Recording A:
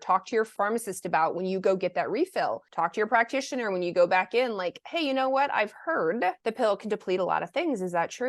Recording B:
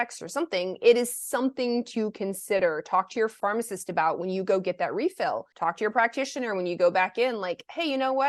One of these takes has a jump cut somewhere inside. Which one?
A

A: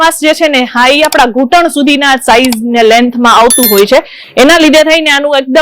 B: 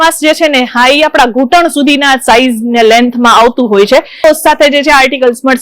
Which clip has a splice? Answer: B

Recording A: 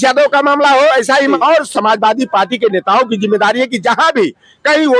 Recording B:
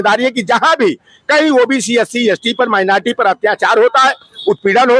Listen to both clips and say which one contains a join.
A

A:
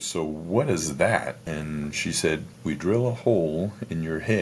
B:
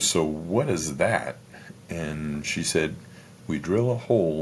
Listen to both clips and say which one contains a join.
A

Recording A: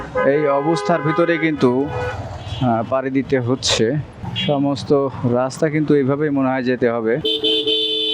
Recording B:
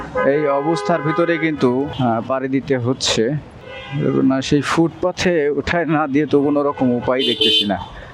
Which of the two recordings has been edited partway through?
B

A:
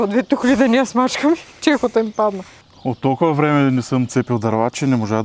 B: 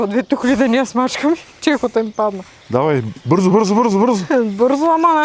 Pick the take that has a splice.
A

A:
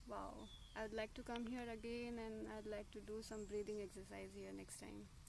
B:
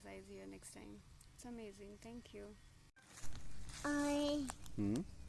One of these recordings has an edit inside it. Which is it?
B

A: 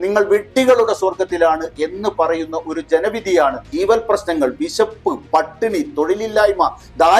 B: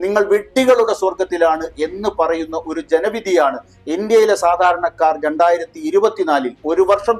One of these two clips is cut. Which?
A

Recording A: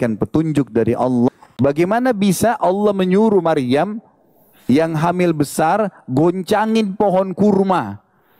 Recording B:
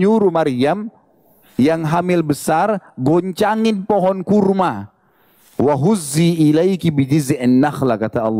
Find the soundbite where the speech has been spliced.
A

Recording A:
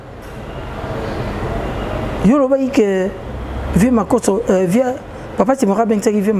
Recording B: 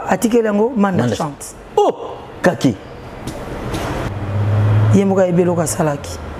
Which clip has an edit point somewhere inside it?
B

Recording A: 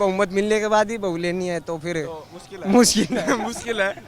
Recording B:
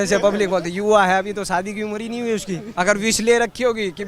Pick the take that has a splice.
B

